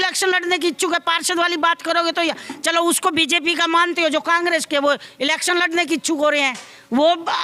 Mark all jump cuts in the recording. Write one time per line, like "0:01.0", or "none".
none